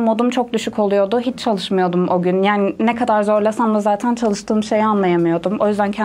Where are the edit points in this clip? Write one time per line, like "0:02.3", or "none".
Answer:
none